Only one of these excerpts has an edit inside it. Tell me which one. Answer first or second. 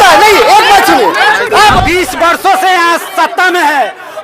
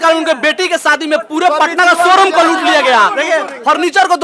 first